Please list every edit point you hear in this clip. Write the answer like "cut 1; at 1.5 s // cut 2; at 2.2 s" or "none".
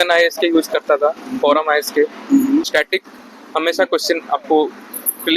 cut 1; at 2.6 s